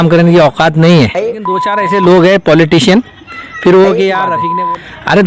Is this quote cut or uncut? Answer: cut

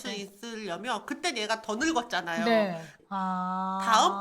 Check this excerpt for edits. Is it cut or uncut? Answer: cut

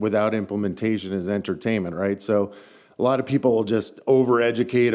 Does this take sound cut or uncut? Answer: uncut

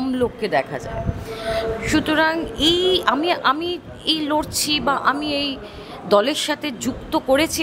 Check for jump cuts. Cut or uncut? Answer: uncut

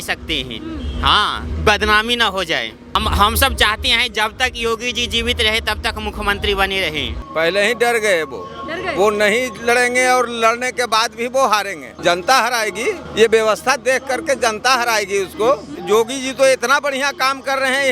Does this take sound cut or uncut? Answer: cut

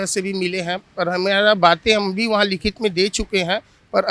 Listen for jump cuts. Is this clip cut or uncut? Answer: uncut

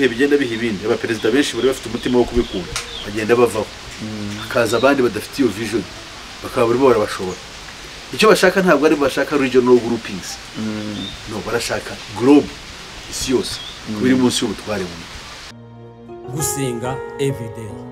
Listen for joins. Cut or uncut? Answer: cut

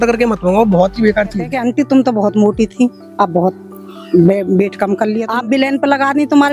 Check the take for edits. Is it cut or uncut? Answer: cut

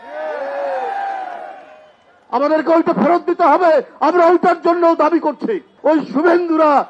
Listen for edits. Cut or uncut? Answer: cut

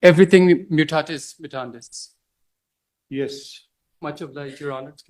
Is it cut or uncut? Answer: uncut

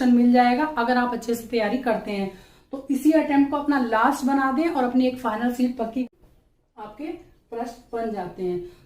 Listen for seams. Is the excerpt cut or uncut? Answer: cut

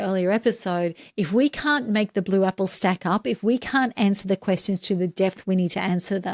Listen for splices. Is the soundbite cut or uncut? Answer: uncut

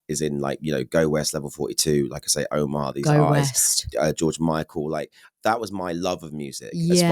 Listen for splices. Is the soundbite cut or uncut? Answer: uncut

